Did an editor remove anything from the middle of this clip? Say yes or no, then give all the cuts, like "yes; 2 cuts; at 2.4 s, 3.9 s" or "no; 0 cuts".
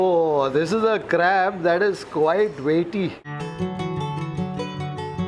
no; 0 cuts